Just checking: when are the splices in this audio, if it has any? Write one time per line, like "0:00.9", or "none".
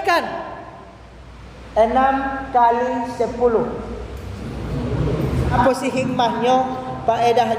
0:05.6